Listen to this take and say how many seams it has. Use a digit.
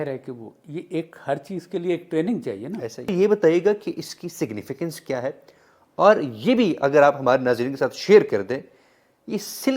1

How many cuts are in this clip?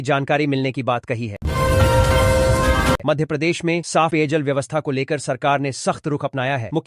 2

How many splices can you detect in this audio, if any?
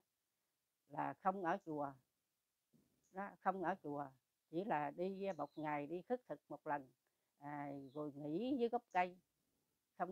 0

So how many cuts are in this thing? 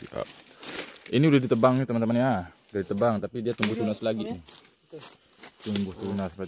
0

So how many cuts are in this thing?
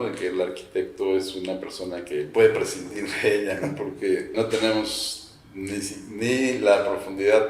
2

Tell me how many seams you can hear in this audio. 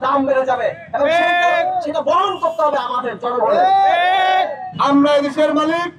1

